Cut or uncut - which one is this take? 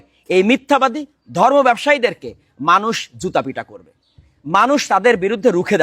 uncut